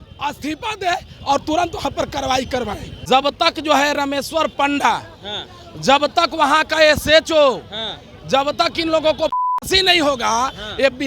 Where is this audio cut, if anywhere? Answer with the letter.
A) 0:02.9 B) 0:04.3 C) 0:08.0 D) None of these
A